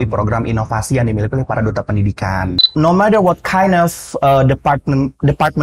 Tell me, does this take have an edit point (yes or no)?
yes